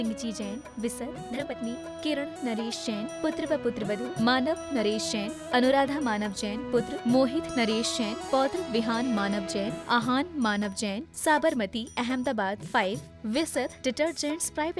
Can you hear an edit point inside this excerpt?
yes; 1 cut; at 1.3 s

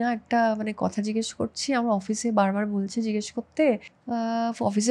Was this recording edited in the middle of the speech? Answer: yes; 1 cut; at 3.9 s

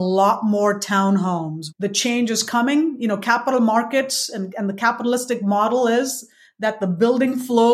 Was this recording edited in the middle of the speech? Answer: yes; 1 cut; at 1.6 s

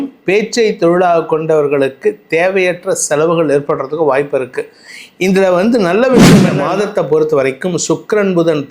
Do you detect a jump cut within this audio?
yes; 1 cut; at 6.6 s

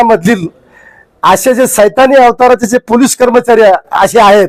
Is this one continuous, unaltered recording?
yes; 0 cuts

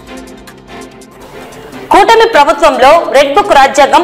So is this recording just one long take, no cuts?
yes; 0 cuts

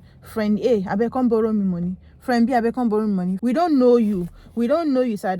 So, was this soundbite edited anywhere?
yes; 1 cut; at 3.4 s

